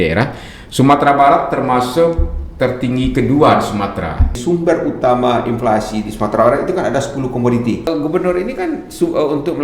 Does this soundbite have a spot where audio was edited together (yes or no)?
yes